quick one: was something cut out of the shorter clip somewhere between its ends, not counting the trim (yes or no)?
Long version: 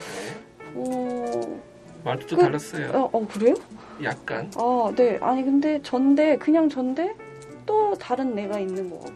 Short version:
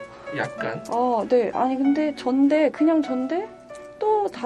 no